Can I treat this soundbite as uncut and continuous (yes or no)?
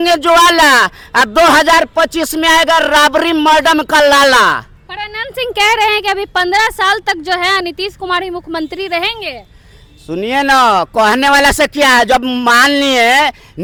yes